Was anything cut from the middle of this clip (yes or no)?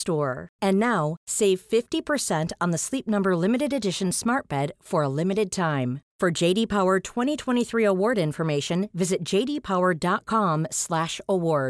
no